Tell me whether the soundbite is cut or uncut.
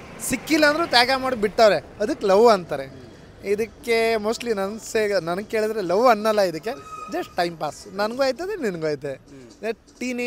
uncut